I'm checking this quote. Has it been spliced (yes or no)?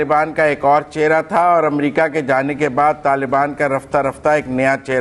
no